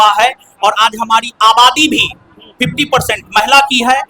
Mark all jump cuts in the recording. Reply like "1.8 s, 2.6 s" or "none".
none